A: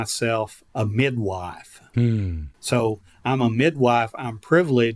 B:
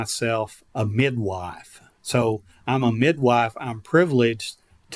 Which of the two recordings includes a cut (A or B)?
B